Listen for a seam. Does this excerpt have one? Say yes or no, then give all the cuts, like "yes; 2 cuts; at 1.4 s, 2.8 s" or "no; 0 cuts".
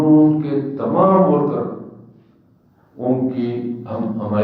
no; 0 cuts